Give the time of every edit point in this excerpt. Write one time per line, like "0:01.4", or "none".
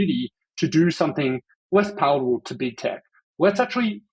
0:01.5
0:03.2